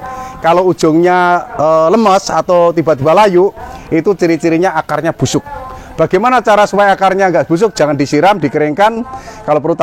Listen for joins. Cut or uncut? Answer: uncut